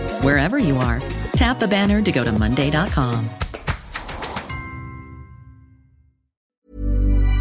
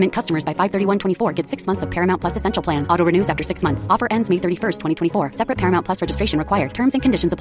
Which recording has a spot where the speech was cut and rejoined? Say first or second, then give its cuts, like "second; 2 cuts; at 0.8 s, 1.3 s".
first; 1 cut; at 6.4 s